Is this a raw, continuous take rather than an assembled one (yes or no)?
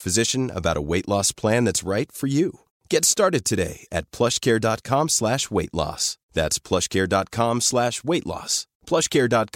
yes